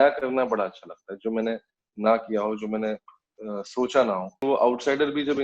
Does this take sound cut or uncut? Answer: cut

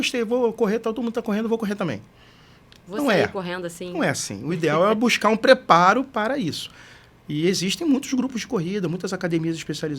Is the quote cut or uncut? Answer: uncut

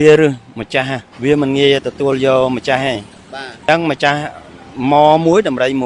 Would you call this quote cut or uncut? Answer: cut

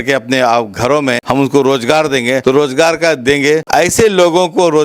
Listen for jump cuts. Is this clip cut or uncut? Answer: cut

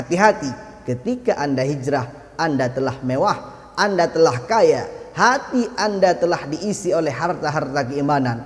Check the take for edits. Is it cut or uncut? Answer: uncut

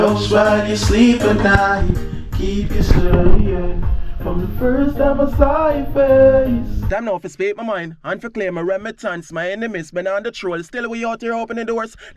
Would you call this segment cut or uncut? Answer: cut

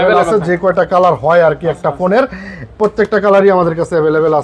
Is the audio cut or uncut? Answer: uncut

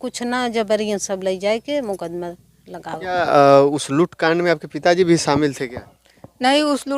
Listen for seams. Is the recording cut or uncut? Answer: cut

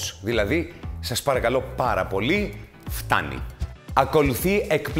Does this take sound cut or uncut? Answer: cut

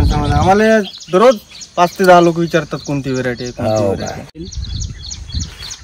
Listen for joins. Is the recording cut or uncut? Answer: cut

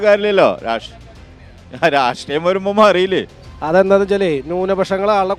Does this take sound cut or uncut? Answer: cut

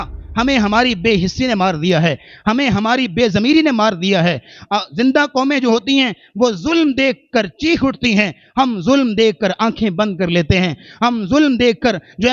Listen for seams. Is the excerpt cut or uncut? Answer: uncut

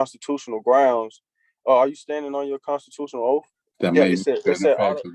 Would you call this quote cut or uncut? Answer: cut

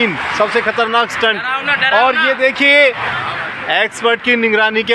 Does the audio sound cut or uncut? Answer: cut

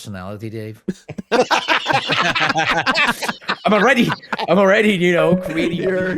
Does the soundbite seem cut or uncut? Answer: uncut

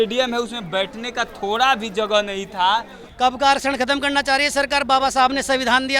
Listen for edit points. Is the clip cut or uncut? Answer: cut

